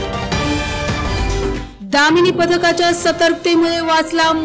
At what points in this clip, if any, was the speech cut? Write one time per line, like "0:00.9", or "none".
0:01.6